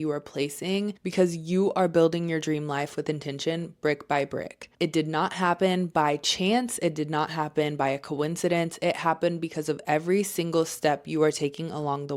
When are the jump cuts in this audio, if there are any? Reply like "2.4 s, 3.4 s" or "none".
1.0 s